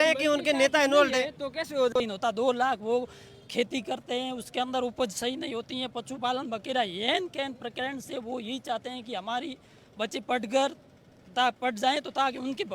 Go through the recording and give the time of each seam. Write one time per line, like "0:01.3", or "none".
0:01.9